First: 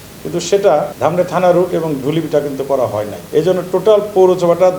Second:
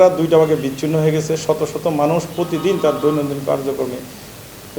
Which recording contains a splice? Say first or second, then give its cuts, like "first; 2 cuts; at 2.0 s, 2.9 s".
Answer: first; 2 cuts; at 0.9 s, 3.2 s